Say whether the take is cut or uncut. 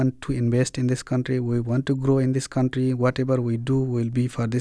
uncut